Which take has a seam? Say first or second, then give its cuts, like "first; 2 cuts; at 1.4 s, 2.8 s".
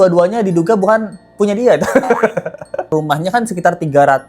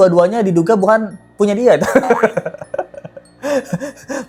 first; 1 cut; at 2.9 s